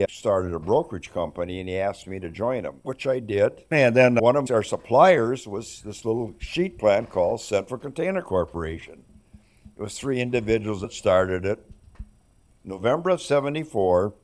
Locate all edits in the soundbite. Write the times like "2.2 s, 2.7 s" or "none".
10.8 s, 12.6 s

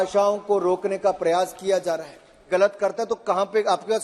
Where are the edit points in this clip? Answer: 2.5 s

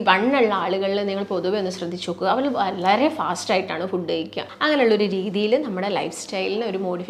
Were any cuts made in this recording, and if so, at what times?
4.4 s

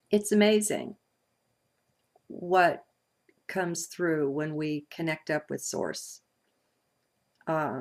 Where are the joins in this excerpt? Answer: 4.7 s

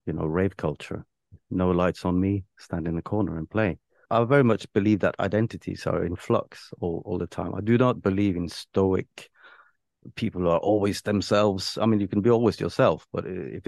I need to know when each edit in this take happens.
4.1 s

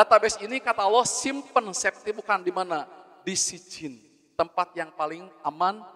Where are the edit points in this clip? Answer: none

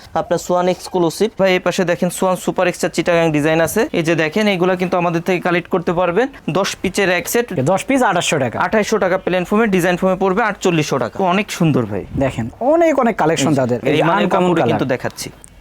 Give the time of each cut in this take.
1.4 s, 3.9 s, 7.5 s, 11.2 s, 13.8 s

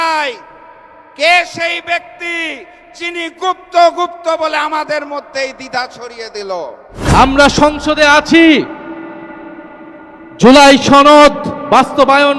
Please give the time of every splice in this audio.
7.0 s

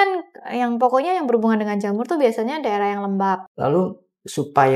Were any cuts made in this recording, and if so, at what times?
3.5 s

